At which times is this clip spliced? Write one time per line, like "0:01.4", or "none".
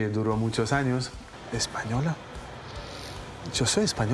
0:01.3